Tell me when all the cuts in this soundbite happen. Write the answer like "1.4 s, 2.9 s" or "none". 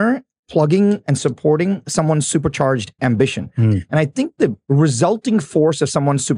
4.6 s